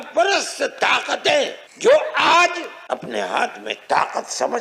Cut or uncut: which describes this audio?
cut